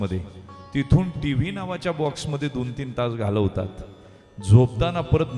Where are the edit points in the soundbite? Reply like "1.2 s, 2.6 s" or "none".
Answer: none